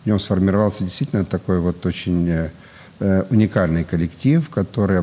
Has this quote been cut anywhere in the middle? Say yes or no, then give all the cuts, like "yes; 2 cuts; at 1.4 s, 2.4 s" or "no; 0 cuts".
no; 0 cuts